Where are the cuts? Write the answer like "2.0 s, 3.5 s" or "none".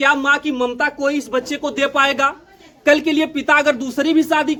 none

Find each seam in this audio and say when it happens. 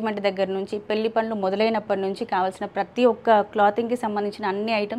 none

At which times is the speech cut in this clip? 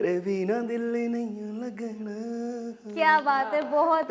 none

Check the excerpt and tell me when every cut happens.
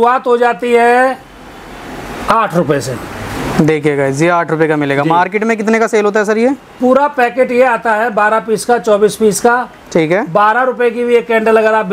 none

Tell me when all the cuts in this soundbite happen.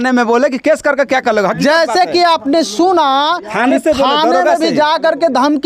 none

